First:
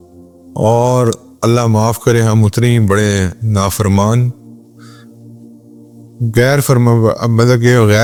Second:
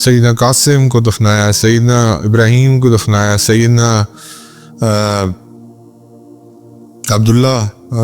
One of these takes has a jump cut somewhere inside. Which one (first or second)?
second